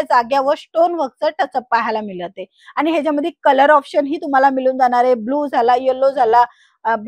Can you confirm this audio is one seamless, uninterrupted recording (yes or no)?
yes